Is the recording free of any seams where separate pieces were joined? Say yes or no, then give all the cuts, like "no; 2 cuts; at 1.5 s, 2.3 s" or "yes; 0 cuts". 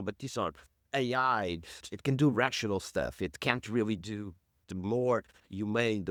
yes; 0 cuts